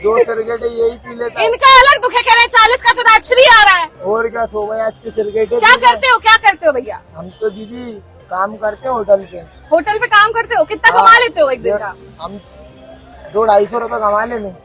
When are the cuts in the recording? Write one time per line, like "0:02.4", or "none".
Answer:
none